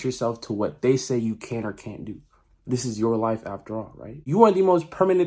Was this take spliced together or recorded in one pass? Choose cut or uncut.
cut